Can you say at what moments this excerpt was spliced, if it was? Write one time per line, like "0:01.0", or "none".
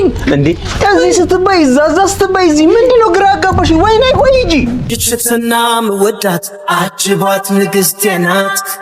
0:04.9